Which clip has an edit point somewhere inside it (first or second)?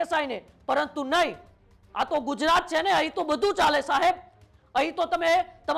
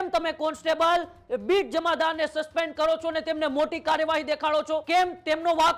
second